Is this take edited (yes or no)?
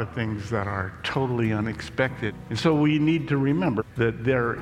yes